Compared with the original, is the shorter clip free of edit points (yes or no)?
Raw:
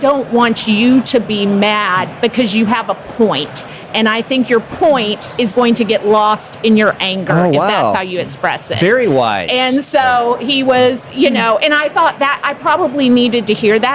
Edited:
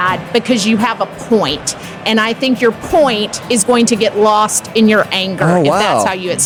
yes